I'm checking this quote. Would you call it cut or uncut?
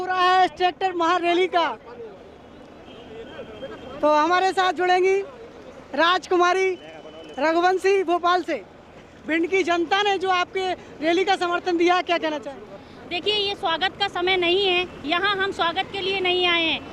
cut